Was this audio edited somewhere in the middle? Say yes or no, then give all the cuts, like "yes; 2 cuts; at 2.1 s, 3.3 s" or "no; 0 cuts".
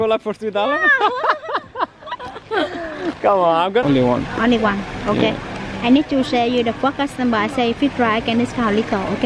yes; 1 cut; at 3.8 s